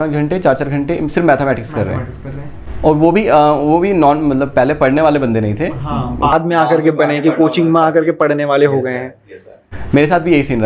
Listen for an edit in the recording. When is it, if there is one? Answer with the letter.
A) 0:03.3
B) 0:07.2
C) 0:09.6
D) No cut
D